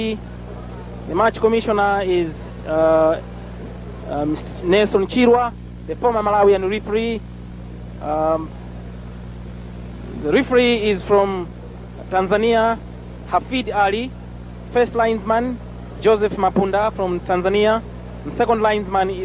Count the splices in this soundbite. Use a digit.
1